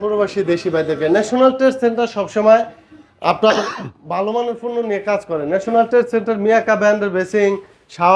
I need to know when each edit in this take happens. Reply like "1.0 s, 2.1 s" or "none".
none